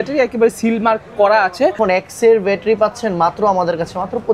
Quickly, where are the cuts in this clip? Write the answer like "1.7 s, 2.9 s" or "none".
1.8 s